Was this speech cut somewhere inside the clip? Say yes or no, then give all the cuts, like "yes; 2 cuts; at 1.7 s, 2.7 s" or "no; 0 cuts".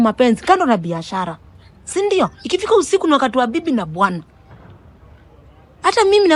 no; 0 cuts